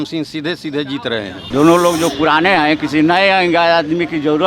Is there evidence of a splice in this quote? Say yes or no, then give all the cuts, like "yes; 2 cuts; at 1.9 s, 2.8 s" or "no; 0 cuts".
yes; 1 cut; at 1.4 s